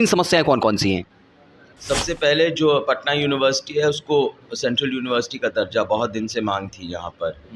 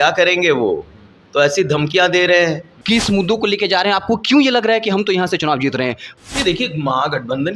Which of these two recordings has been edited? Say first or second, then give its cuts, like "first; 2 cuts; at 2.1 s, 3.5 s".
second; 2 cuts; at 2.7 s, 6.0 s